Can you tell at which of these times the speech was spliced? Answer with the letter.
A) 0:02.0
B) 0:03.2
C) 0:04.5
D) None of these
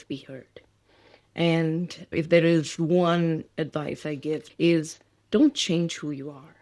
C